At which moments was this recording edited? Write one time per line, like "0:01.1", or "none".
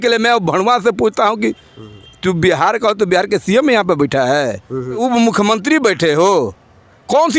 0:05.0